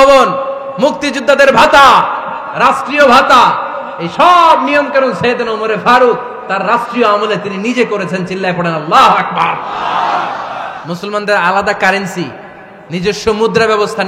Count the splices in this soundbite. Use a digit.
0